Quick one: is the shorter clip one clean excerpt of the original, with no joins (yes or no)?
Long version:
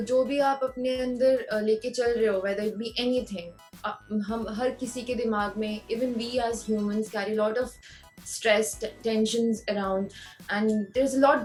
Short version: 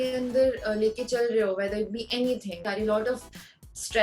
no